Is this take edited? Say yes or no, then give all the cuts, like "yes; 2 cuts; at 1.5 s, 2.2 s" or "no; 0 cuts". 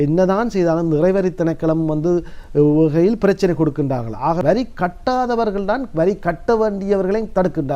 yes; 1 cut; at 4.4 s